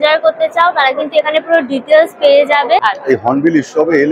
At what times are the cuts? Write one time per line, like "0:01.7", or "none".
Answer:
0:02.8